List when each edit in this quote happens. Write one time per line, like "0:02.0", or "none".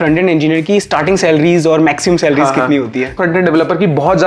0:03.1